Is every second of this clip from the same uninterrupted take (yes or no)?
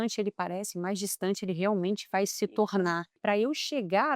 no